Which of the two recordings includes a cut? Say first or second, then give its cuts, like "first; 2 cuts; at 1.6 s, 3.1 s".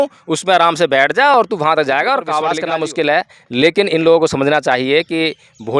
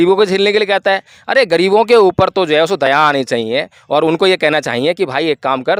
first; 1 cut; at 2.6 s